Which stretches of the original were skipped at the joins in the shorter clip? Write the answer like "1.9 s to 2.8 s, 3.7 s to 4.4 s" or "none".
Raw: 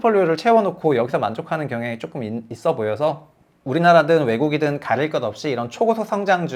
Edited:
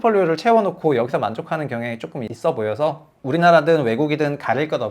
2.3 s to 2.5 s, 3.3 s to 3.5 s